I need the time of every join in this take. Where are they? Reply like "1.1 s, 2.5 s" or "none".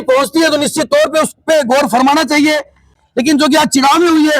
3.0 s